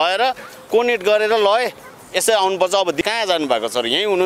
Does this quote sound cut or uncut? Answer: cut